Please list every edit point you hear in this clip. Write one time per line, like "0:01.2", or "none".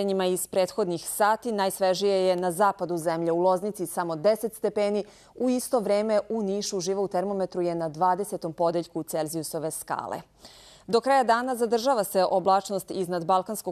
0:03.0